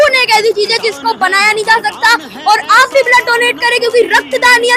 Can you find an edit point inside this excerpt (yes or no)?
no